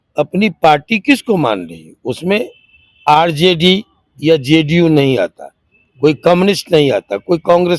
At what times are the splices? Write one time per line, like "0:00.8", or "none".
none